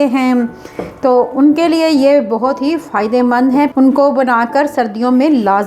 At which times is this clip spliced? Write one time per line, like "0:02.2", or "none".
0:03.7